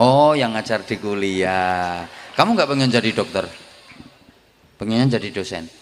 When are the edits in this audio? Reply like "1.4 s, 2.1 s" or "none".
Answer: none